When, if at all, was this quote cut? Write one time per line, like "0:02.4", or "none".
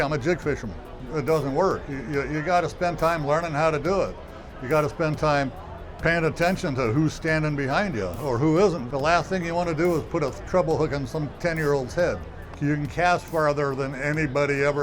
0:08.9
0:12.4